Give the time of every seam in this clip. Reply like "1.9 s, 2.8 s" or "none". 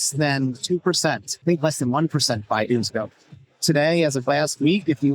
1.3 s